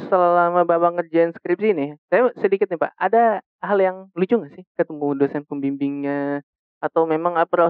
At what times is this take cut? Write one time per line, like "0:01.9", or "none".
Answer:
none